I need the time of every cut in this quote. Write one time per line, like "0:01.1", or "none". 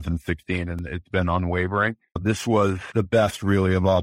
0:02.1
0:02.8